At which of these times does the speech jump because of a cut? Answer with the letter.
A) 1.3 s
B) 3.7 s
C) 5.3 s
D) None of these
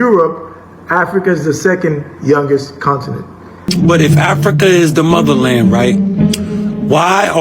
B